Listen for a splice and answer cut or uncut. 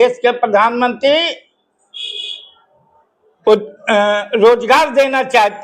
uncut